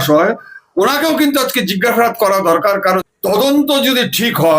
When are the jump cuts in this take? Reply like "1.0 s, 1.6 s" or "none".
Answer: 3.0 s